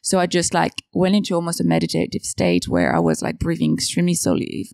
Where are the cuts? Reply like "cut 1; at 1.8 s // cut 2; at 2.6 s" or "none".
none

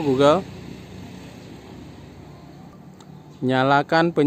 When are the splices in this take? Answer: cut 1; at 2.8 s

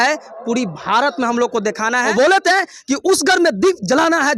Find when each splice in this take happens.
cut 1; at 2.1 s

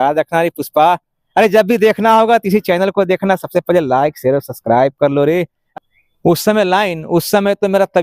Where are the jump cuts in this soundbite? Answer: cut 1; at 5.6 s

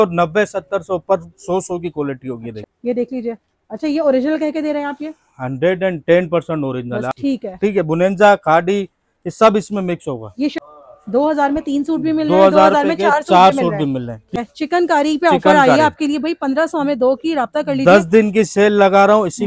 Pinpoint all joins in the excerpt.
cut 1; at 2.7 s // cut 2; at 7.1 s // cut 3; at 10.5 s // cut 4; at 14.3 s

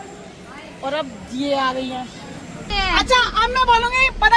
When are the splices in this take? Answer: cut 1; at 2.7 s

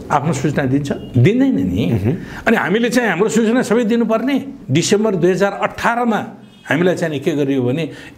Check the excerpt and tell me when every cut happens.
cut 1; at 1.0 s // cut 2; at 4.6 s

